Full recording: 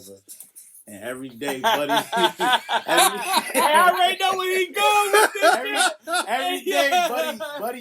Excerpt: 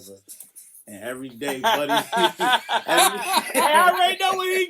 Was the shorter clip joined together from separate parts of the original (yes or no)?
no